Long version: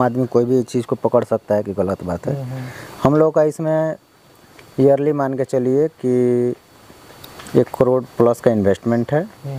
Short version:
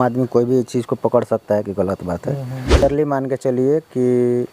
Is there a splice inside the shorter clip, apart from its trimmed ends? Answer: yes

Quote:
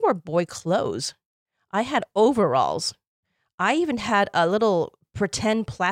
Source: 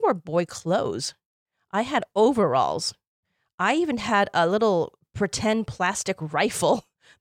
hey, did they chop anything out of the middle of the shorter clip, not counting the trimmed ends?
no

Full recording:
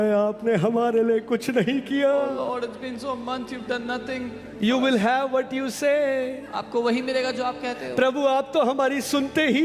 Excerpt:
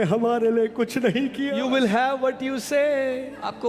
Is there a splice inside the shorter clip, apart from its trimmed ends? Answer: yes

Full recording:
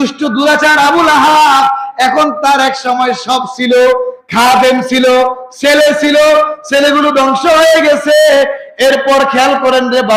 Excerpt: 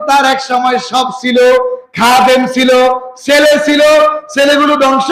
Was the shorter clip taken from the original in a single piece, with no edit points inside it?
yes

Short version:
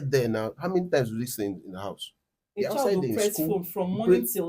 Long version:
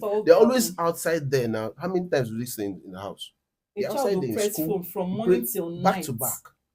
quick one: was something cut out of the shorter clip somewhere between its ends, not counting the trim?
no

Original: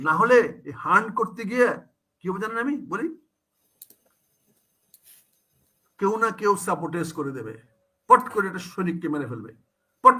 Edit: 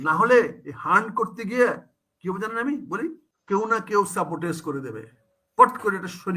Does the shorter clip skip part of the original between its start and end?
yes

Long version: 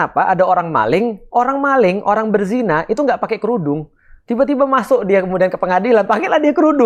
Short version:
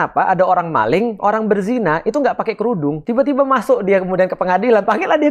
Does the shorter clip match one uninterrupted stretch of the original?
no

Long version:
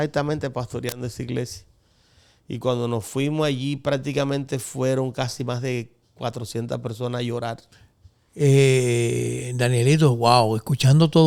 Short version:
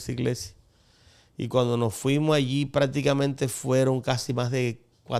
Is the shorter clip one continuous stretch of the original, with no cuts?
yes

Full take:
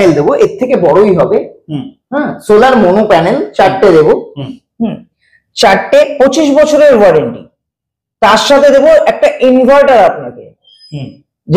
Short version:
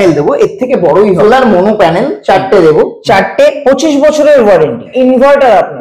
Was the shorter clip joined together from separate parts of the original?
yes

